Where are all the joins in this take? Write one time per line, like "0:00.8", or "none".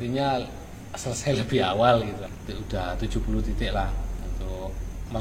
0:02.2